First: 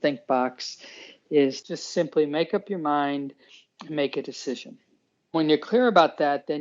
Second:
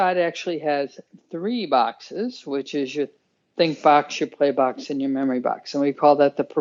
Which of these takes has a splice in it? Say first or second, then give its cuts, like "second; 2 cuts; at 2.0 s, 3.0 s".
first; 2 cuts; at 1.6 s, 5.3 s